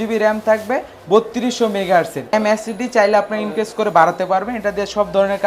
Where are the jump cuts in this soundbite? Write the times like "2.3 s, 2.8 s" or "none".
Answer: 2.3 s